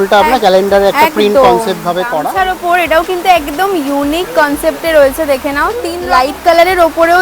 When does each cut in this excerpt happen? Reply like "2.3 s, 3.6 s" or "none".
2.3 s, 5.9 s